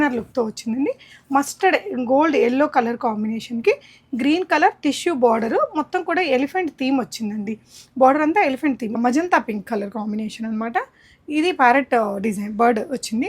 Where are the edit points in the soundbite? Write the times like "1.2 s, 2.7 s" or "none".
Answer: 8.9 s